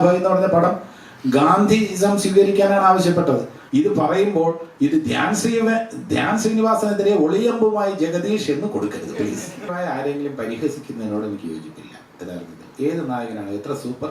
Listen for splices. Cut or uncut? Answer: cut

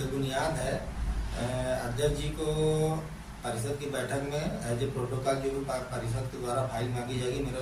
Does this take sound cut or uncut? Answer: uncut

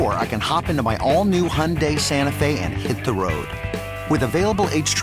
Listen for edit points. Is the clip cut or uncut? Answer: uncut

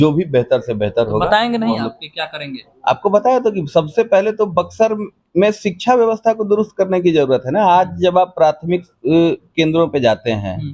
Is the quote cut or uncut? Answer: uncut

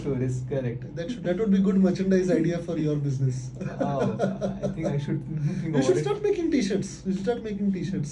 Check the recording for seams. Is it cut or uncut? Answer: uncut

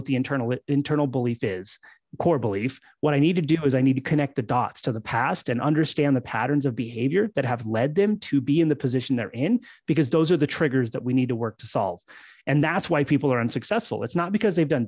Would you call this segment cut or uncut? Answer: uncut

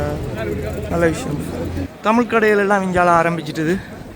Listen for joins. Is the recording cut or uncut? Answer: cut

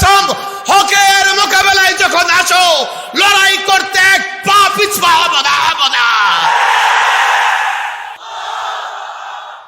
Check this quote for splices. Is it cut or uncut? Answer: cut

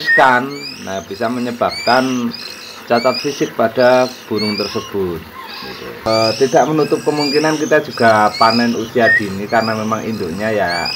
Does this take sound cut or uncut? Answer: cut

